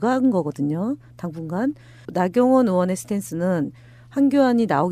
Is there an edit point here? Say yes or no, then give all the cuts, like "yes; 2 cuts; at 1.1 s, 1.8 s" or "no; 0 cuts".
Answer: yes; 1 cut; at 3.9 s